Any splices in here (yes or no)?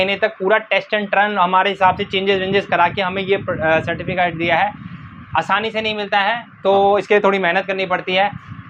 no